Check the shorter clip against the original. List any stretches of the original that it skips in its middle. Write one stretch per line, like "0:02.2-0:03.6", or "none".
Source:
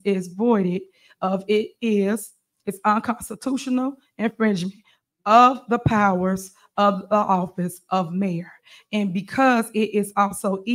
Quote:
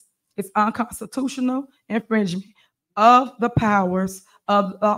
none